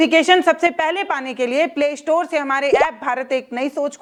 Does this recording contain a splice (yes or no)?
no